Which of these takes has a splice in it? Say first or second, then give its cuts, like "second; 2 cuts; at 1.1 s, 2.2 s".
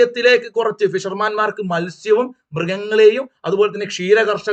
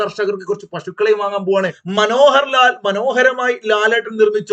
second; 1 cut; at 1.8 s